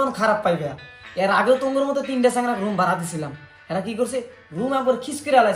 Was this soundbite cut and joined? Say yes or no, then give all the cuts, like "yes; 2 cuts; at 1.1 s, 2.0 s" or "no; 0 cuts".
no; 0 cuts